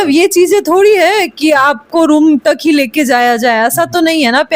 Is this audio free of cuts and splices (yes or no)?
yes